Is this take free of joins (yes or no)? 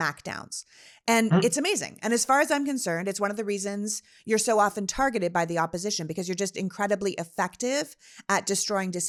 yes